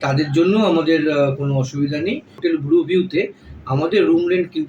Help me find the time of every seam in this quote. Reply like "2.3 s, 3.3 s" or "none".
2.4 s